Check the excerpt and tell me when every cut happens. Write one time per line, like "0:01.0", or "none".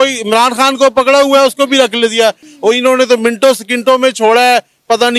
0:02.5